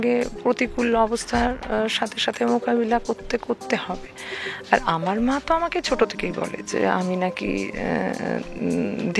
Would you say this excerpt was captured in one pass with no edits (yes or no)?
yes